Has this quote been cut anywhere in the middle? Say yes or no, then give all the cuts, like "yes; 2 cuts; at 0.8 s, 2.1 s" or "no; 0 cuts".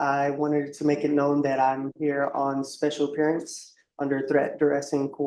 no; 0 cuts